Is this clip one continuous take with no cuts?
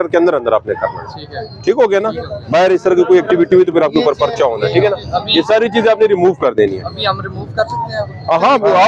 yes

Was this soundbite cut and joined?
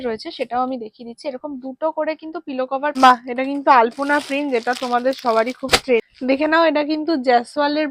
yes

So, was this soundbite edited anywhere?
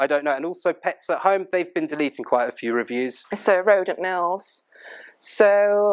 yes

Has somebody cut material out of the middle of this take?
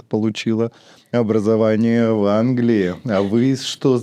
no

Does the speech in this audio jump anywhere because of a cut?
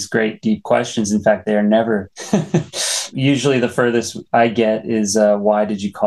no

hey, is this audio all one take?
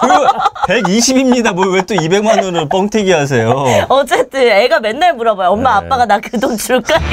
yes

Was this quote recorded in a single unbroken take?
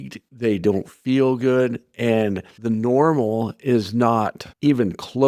yes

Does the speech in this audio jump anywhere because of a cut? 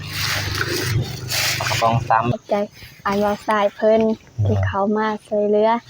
yes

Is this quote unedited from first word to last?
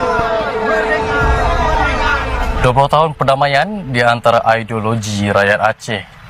yes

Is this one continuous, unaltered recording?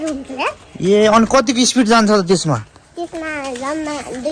yes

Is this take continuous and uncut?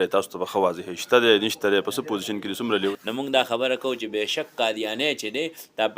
no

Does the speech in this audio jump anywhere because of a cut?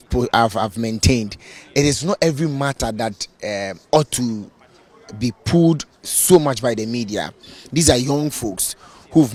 no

